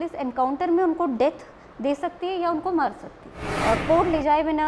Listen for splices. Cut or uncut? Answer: cut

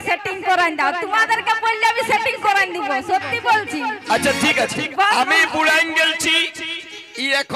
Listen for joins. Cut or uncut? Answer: cut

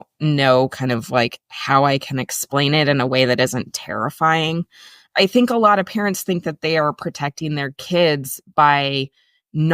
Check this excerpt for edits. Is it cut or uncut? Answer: cut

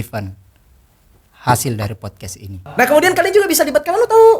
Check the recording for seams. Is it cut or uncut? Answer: cut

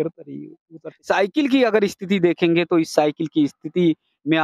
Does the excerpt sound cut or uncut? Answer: cut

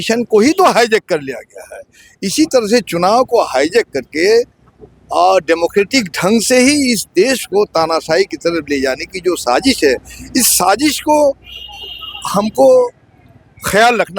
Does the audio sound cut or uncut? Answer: uncut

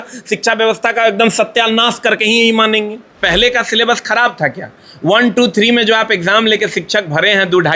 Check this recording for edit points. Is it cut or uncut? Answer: cut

